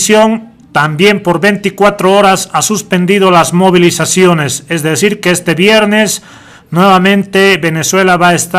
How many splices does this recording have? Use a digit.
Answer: 1